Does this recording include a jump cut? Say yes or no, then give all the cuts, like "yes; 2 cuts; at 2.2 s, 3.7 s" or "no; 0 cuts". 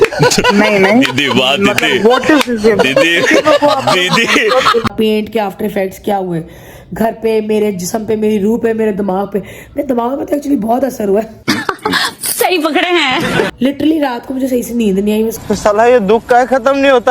yes; 2 cuts; at 4.8 s, 13.5 s